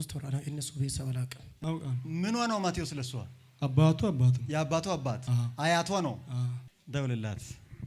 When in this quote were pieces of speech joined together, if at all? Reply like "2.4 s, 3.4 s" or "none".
1.6 s, 6.6 s